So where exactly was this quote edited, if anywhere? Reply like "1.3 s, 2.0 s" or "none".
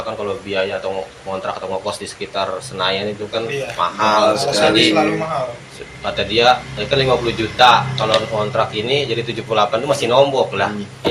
none